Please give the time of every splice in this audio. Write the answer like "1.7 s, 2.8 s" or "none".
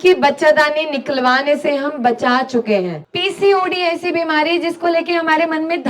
3.0 s